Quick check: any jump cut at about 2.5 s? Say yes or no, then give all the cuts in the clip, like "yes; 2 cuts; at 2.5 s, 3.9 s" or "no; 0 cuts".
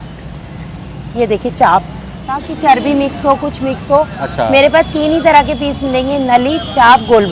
yes; 1 cut; at 2.5 s